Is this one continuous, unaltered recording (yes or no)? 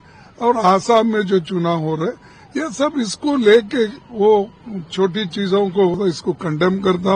no